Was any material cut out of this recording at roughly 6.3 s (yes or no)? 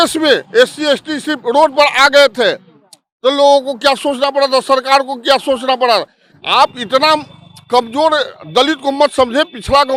no